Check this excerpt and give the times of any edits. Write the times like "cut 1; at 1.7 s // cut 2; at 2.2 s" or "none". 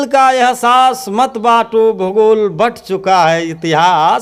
none